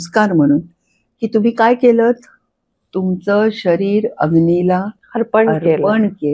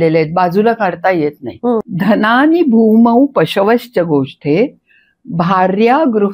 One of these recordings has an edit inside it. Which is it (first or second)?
second